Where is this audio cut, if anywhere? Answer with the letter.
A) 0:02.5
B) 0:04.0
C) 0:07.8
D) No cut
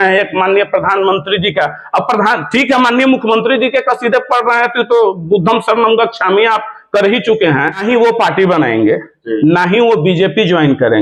C